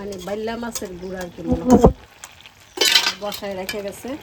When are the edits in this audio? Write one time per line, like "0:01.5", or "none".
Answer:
none